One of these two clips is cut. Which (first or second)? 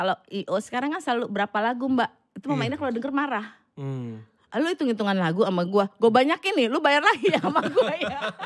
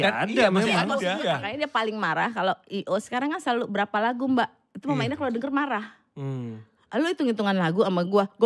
second